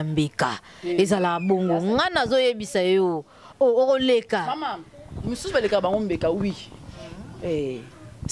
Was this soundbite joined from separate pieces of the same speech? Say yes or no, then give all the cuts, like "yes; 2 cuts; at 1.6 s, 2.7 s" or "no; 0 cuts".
no; 0 cuts